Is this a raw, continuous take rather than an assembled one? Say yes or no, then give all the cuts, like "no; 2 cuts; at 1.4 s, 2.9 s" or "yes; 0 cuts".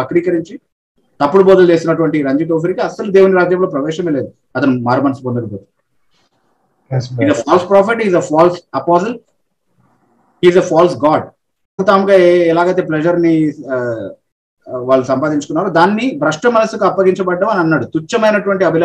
no; 1 cut; at 11.8 s